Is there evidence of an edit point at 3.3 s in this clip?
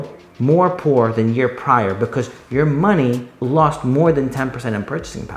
yes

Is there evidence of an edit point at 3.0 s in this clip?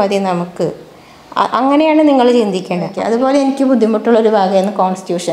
yes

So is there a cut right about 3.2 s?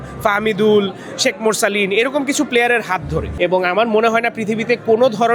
yes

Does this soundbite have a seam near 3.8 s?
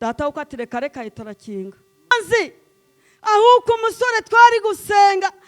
no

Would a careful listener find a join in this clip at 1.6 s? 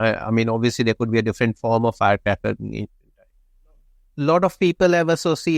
no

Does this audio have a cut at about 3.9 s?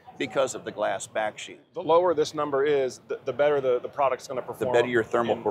no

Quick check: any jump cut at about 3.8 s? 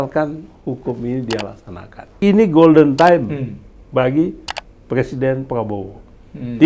no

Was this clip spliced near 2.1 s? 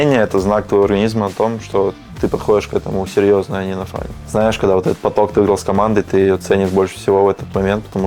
yes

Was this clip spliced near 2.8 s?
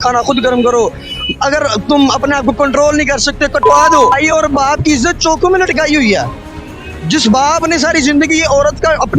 no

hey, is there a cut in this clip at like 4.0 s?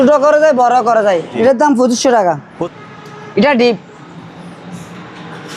no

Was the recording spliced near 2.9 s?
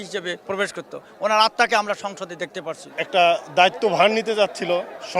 yes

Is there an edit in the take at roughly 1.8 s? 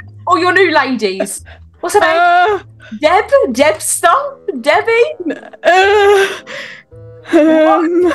no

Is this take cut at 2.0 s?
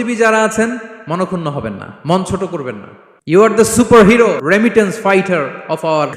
no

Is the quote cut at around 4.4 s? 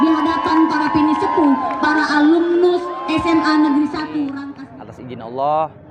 yes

